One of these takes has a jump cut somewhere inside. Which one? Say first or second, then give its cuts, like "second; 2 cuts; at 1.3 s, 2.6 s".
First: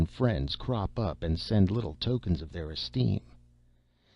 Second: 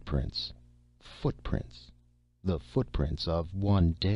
first; 1 cut; at 2.8 s